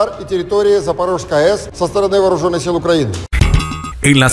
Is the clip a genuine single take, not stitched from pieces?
no; 2 cuts; at 1.7 s, 3.3 s

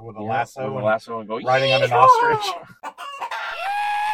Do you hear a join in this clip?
no; 0 cuts

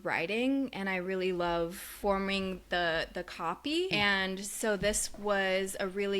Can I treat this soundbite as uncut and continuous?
no; 2 cuts; at 1.8 s, 3.9 s

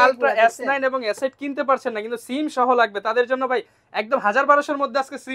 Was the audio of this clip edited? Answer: no; 0 cuts

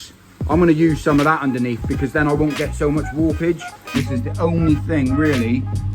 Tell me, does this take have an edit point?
yes; 1 cut; at 4.0 s

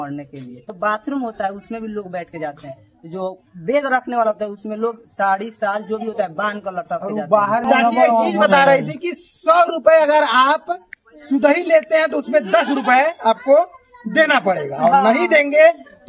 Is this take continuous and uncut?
no; 2 cuts; at 0.7 s, 7.6 s

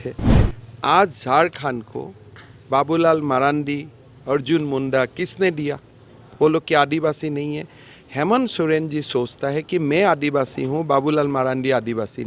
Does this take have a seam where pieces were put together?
no; 0 cuts

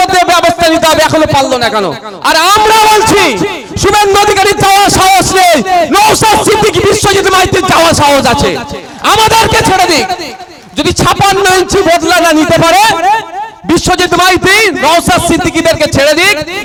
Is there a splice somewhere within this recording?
no; 0 cuts

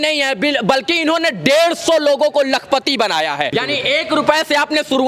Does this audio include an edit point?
yes; 1 cut; at 3.5 s

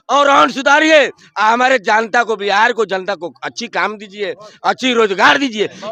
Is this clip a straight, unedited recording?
yes; 0 cuts

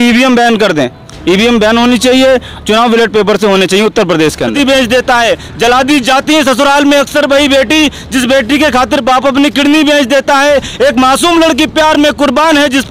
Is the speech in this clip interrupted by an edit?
yes; 1 cut; at 4.5 s

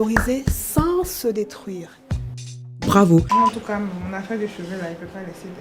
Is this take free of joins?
no; 1 cut; at 3.3 s

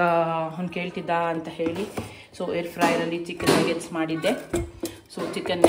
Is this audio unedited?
yes; 0 cuts

